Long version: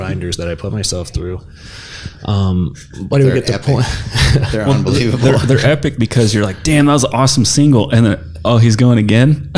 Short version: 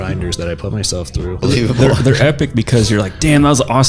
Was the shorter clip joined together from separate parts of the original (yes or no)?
yes